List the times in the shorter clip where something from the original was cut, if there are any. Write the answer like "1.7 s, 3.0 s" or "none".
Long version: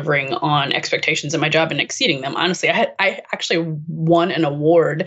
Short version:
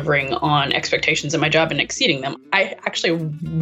2.4 s